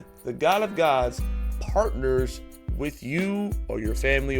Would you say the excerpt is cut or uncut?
uncut